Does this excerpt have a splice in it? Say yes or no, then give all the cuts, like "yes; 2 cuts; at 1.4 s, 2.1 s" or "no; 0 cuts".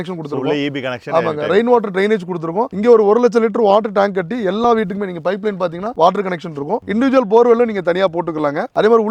no; 0 cuts